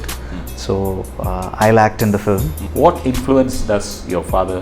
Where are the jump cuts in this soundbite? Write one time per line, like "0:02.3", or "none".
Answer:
0:02.6